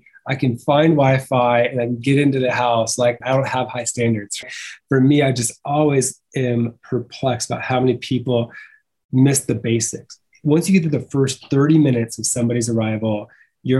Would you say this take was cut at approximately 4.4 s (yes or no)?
yes